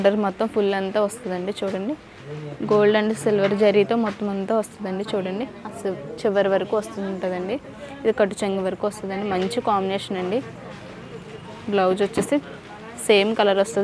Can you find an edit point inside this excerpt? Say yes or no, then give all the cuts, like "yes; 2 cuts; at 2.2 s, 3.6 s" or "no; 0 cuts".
no; 0 cuts